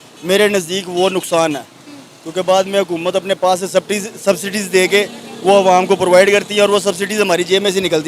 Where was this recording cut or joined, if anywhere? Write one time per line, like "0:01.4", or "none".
none